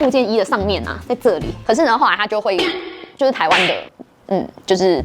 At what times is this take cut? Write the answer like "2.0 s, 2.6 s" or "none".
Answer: 1.5 s